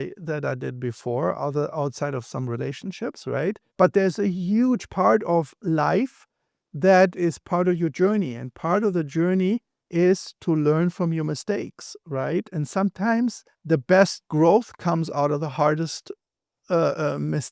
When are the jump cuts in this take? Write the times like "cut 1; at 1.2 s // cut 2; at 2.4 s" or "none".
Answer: cut 1; at 3.6 s // cut 2; at 9.8 s // cut 3; at 13.5 s